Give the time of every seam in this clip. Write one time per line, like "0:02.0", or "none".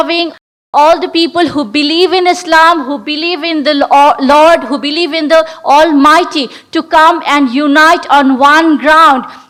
none